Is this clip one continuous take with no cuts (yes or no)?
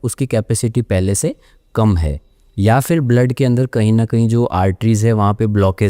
yes